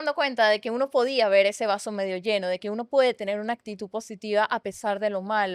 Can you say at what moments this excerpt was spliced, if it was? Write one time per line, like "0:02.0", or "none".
none